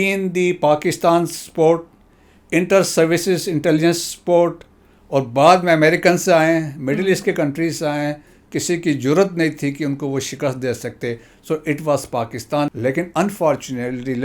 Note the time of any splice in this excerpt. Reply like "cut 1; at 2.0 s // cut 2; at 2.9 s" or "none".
cut 1; at 12.7 s